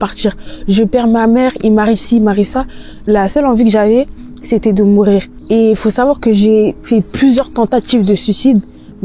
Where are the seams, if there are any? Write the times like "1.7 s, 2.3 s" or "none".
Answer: 3.0 s, 5.3 s